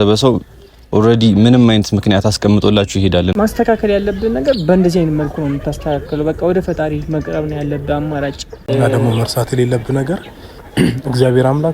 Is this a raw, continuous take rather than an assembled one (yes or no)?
no